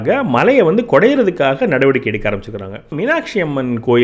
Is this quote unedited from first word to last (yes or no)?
no